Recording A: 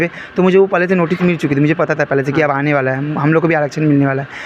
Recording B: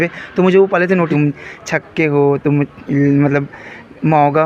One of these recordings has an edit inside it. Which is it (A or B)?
B